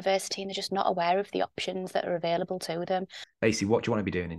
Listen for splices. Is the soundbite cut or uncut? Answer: cut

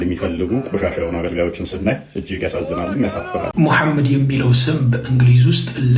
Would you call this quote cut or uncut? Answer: cut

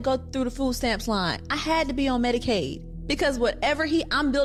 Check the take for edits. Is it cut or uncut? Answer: uncut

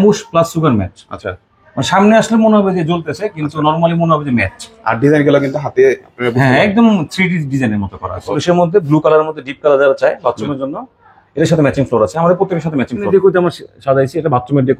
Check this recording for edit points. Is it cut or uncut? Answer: cut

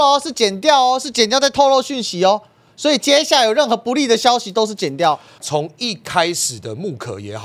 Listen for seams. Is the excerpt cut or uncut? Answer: cut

